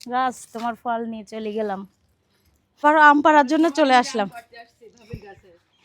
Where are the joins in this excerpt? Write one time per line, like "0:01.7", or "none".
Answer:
0:02.8

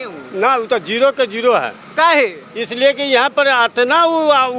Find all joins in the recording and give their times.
none

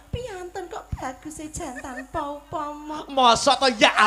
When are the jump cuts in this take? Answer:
none

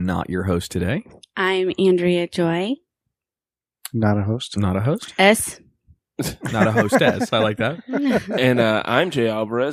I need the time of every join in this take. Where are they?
none

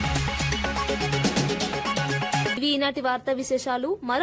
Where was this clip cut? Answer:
none

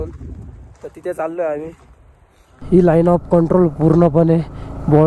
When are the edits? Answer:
0:02.6

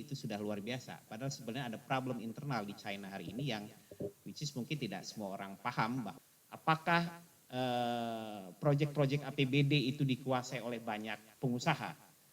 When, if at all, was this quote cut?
0:06.1

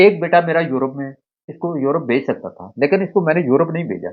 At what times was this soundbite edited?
0:01.4

